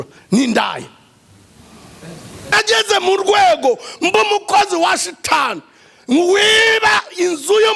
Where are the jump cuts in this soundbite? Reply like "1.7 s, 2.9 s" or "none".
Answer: 2.5 s